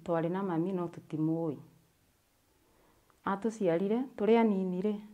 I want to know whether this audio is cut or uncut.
uncut